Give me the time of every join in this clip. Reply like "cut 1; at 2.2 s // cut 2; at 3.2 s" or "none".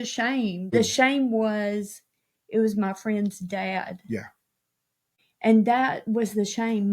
cut 1; at 0.7 s // cut 2; at 4.7 s